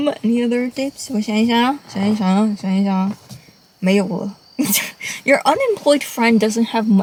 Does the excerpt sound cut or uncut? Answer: uncut